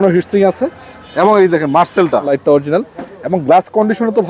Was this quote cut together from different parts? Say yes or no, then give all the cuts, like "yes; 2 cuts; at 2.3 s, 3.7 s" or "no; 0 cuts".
yes; 1 cut; at 2.3 s